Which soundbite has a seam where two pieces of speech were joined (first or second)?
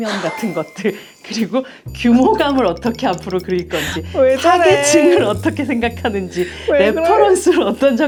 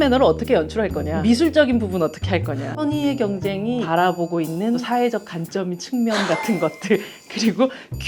second